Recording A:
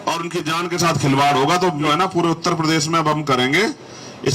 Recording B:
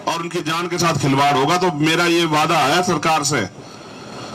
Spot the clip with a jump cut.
A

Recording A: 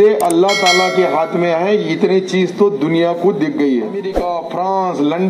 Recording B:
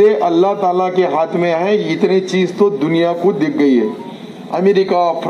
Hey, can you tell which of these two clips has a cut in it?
A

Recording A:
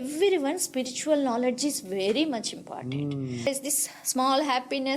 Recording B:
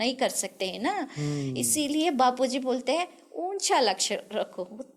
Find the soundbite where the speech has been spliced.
A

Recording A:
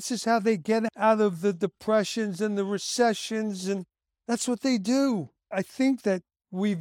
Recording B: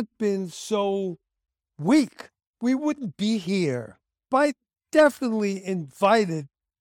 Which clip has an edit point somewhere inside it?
A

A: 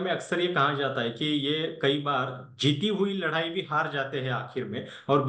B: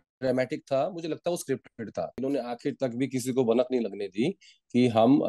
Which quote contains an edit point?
B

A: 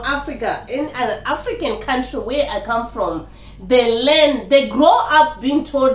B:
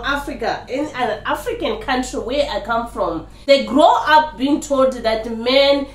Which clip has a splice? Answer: B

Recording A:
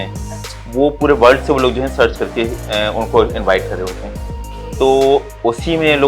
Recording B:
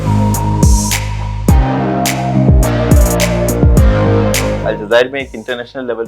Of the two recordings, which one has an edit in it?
B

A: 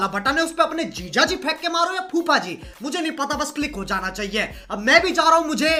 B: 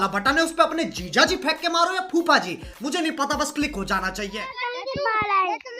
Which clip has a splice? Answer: B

